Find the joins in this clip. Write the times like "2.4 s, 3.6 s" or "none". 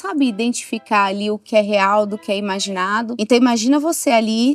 3.2 s